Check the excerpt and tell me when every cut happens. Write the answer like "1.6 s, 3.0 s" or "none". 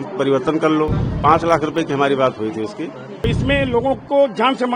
1.0 s, 3.2 s

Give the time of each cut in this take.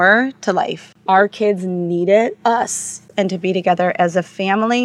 0.9 s, 3.0 s

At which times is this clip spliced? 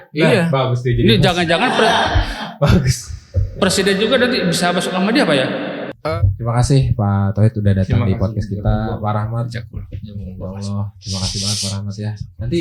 5.9 s

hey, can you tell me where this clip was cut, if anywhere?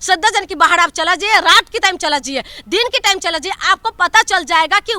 none

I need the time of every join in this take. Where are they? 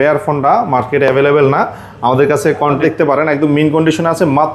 2.8 s

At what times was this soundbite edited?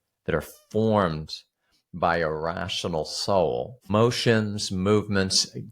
3.8 s

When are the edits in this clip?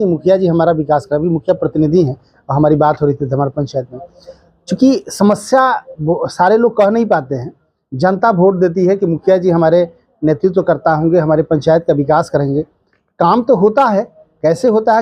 none

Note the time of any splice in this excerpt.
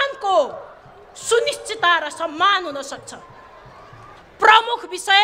4.2 s

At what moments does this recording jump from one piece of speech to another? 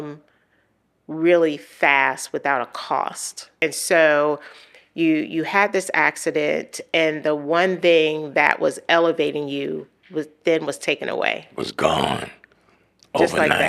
3.5 s

